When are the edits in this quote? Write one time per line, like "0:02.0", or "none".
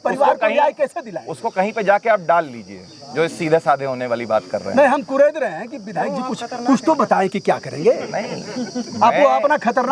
none